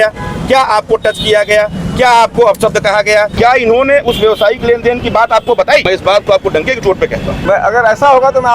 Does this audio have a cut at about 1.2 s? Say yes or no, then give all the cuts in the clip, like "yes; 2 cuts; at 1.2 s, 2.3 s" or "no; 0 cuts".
no; 3 cuts; at 3.3 s, 5.8 s, 7.4 s